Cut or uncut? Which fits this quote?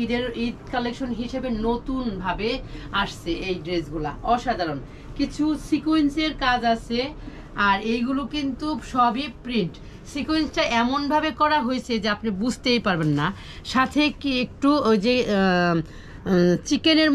uncut